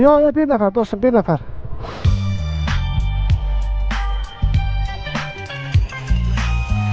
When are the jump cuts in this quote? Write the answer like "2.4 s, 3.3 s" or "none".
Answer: 1.9 s